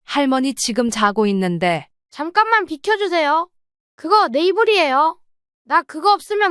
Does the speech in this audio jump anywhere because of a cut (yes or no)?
yes